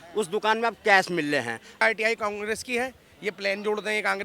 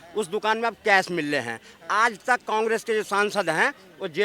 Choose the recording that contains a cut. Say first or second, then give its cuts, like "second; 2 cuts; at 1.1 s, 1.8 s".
first; 1 cut; at 1.8 s